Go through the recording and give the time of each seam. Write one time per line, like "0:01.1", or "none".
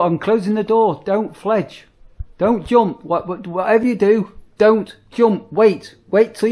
none